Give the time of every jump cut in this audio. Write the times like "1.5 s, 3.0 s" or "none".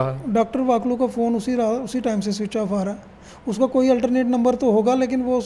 none